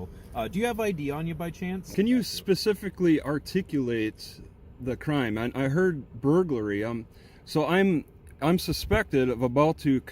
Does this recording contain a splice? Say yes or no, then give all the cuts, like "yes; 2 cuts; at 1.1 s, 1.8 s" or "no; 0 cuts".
yes; 1 cut; at 1.7 s